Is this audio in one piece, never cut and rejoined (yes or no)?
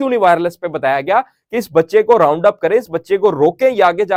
yes